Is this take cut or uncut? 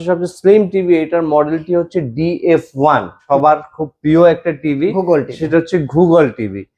cut